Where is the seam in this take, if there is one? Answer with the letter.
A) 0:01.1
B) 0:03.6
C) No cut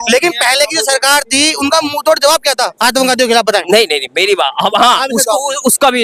C